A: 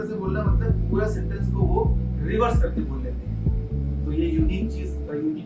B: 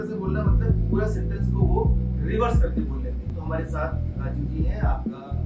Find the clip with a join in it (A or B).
B